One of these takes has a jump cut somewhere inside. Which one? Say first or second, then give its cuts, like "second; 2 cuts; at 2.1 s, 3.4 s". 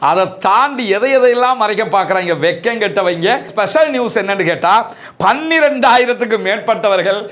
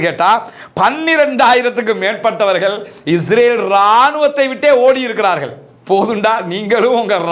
first; 1 cut; at 3.5 s